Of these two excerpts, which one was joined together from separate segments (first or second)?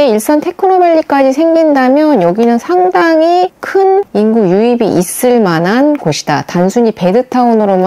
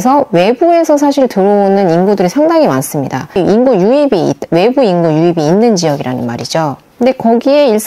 second